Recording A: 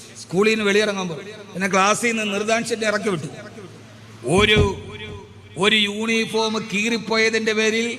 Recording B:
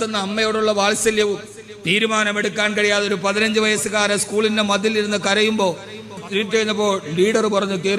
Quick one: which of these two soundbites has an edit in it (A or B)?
B